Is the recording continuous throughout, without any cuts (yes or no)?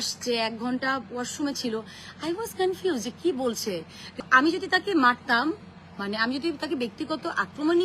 no